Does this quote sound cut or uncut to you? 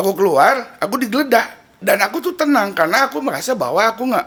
uncut